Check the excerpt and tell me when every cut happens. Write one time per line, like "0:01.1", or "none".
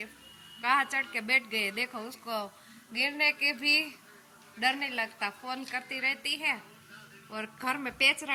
none